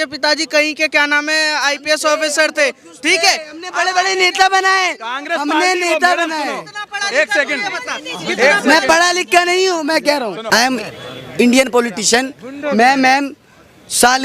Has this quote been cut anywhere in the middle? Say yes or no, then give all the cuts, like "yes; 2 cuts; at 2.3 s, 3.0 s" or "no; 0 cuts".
yes; 1 cut; at 10.4 s